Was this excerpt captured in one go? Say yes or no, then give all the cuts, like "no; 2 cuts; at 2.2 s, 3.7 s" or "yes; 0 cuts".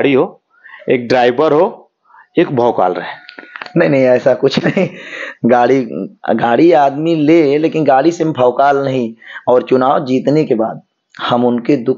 yes; 0 cuts